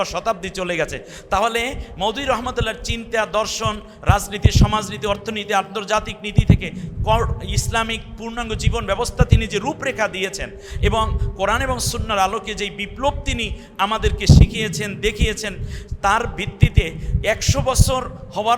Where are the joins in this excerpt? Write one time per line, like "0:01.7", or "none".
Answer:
none

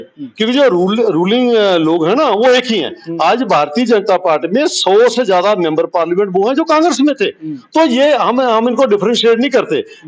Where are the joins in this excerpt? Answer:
none

